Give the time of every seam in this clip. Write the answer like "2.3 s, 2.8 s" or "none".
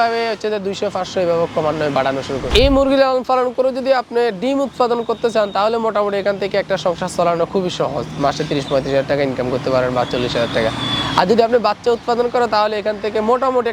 2.5 s